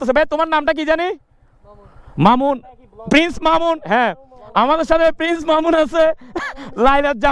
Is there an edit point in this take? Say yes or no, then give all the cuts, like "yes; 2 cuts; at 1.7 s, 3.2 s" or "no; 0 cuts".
yes; 1 cut; at 1.0 s